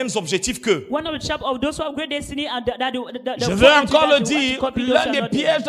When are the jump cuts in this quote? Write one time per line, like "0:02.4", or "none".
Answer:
none